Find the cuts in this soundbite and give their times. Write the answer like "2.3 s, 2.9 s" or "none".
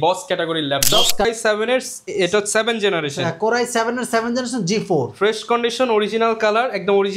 1.2 s